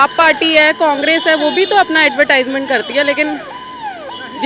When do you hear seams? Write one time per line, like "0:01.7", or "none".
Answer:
none